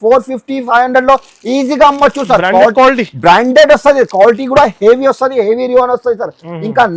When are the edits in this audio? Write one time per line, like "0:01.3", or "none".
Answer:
none